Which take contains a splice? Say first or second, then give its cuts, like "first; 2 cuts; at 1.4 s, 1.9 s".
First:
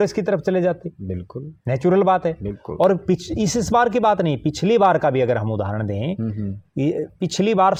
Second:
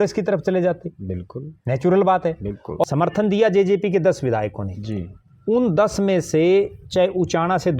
second; 1 cut; at 2.8 s